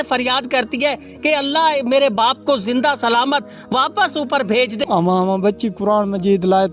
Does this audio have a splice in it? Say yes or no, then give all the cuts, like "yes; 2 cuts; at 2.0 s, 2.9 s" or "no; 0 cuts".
yes; 1 cut; at 4.8 s